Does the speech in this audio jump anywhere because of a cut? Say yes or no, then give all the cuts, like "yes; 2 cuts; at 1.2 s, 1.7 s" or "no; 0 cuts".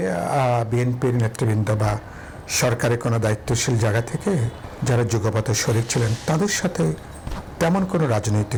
no; 0 cuts